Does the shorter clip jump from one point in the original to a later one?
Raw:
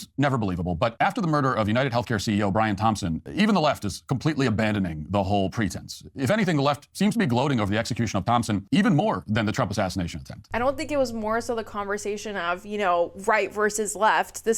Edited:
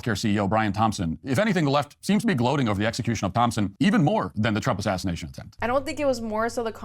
yes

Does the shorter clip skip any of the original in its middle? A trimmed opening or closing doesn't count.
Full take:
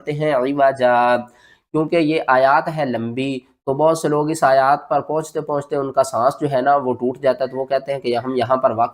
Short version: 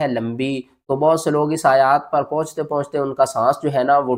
no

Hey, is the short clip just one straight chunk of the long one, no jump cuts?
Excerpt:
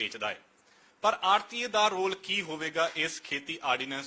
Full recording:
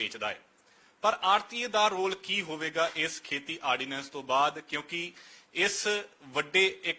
yes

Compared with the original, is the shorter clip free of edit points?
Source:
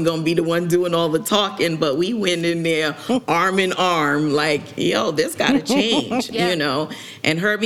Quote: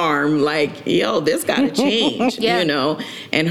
yes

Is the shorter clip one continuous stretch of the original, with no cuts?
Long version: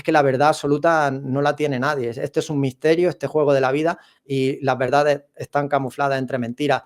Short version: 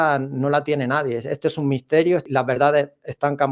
no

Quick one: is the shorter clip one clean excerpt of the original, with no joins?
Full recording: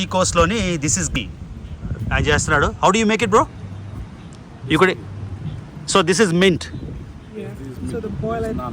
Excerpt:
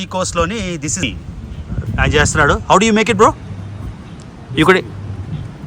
no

